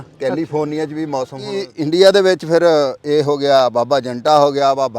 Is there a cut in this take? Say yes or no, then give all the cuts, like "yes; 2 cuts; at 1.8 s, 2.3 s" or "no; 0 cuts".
yes; 1 cut; at 1.7 s